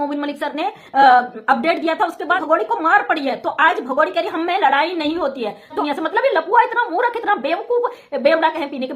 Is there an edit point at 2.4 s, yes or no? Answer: yes